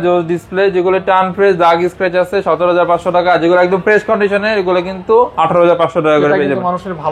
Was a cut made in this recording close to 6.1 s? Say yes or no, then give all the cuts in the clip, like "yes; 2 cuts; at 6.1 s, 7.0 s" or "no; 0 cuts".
no; 0 cuts